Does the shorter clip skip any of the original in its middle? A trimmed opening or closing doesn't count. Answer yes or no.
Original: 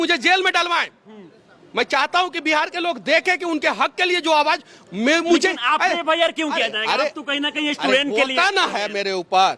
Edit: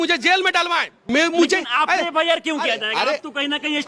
yes